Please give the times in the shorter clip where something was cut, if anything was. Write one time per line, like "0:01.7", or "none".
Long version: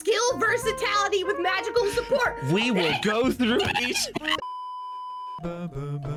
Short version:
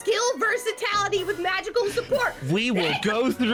none